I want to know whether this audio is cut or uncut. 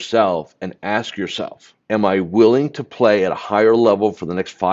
cut